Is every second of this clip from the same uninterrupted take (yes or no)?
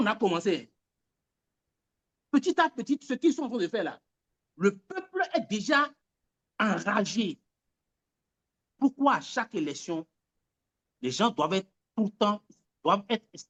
yes